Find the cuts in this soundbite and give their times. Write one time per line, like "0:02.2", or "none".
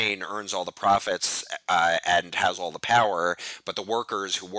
none

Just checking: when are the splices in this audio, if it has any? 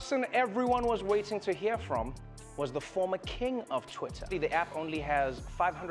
0:04.2

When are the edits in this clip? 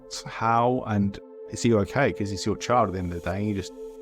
0:01.3

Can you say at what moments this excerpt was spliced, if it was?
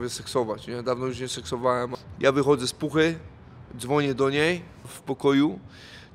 0:02.0
0:05.0

